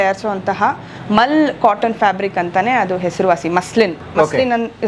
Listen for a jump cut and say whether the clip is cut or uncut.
uncut